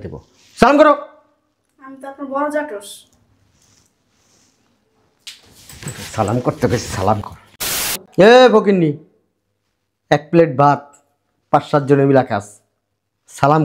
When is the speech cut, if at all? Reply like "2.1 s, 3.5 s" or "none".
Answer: 7.9 s